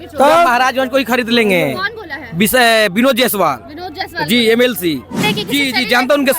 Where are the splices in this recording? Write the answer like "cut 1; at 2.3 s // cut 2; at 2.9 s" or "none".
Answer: cut 1; at 5.3 s